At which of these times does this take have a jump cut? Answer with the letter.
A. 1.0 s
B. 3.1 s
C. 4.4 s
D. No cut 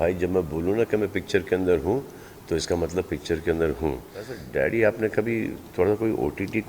C